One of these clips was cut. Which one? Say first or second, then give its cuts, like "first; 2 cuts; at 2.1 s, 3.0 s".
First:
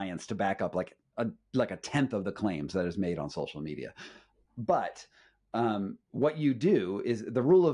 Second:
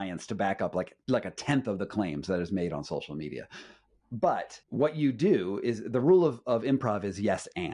second; 2 cuts; at 1.0 s, 4.6 s